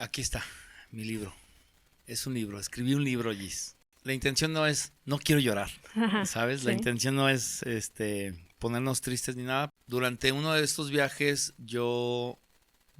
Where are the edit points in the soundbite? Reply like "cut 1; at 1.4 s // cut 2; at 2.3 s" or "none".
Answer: cut 1; at 3.7 s // cut 2; at 9.7 s

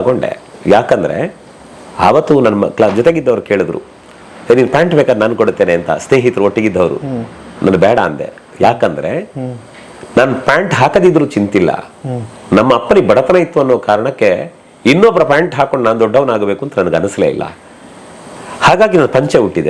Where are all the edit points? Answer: none

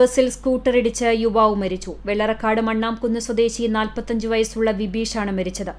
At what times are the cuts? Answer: none

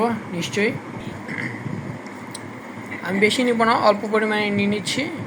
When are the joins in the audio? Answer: cut 1; at 1.0 s

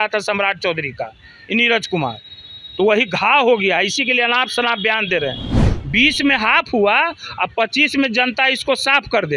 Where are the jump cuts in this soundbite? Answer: cut 1; at 5.6 s

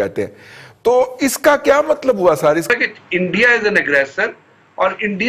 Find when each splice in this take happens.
cut 1; at 2.7 s

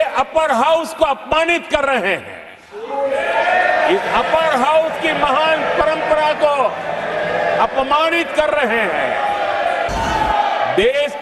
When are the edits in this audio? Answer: cut 1; at 9.9 s

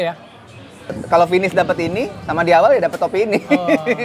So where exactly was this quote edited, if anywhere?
cut 1; at 0.9 s

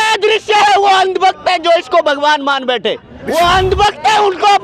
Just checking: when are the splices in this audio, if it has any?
cut 1; at 3.1 s

